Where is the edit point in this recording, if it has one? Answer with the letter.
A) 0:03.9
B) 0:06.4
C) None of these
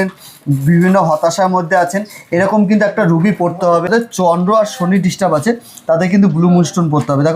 A